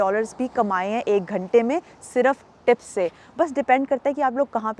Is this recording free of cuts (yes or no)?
yes